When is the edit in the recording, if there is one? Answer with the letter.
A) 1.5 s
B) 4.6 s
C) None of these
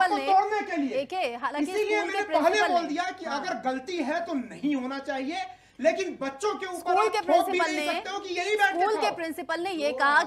C